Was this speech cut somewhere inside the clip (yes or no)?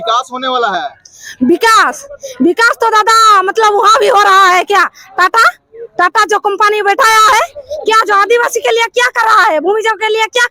no